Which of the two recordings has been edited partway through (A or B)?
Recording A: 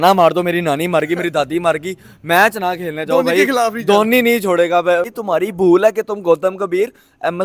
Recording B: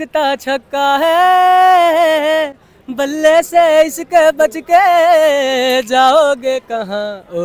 A